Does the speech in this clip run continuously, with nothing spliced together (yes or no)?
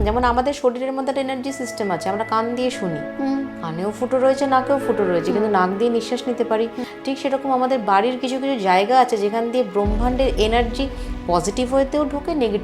no